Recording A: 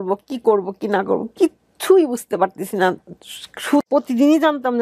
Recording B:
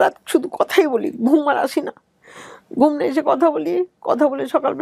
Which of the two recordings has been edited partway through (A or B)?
A